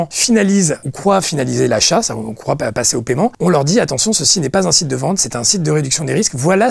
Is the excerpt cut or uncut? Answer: uncut